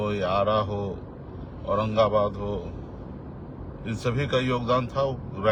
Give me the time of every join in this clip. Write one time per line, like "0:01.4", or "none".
none